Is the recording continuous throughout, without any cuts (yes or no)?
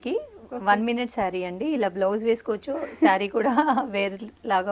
yes